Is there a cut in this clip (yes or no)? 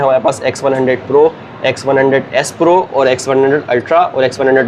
no